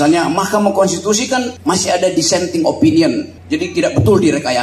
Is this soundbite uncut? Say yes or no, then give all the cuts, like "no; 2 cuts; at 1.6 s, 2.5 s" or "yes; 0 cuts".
no; 1 cut; at 1.5 s